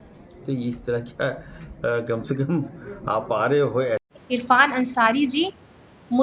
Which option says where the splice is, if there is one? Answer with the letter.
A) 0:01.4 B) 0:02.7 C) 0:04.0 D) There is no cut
C